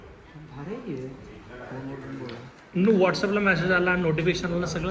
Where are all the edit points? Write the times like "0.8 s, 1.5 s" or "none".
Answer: none